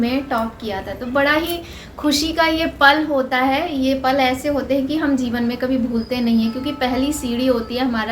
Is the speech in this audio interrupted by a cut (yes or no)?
no